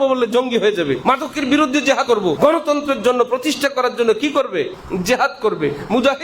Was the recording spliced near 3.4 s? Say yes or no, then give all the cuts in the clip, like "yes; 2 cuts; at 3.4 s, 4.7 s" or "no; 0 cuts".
no; 3 cuts; at 1.0 s, 2.1 s, 4.8 s